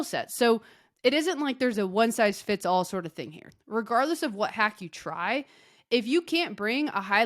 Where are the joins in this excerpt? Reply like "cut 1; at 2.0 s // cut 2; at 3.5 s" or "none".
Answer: cut 1; at 3.5 s